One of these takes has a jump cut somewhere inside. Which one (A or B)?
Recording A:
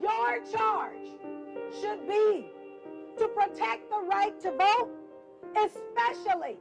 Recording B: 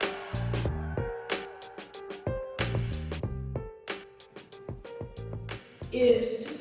A